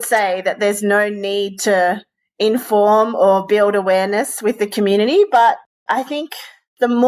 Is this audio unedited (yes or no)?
no